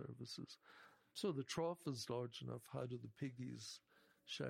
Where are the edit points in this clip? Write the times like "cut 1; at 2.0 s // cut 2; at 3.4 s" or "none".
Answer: cut 1; at 1.1 s